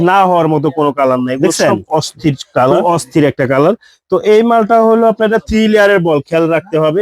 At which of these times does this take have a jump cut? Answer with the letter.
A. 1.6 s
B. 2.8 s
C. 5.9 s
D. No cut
B